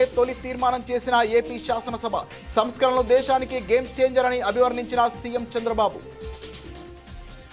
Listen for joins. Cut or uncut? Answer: uncut